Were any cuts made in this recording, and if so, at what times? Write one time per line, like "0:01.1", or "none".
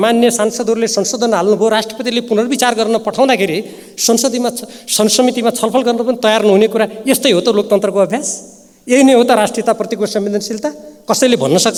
none